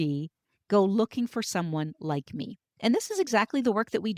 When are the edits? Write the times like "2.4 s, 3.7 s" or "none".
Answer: none